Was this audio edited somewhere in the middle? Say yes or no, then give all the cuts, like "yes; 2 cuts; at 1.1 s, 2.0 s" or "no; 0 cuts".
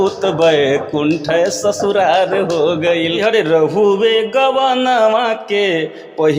yes; 1 cut; at 3.2 s